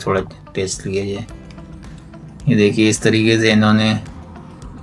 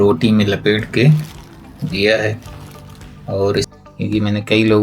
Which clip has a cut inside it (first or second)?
second